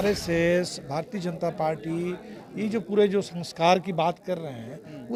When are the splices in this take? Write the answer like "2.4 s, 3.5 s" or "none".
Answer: none